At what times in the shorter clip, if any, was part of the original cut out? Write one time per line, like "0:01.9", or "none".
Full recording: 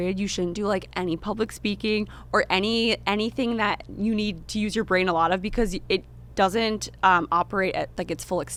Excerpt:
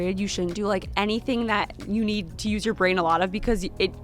0:00.9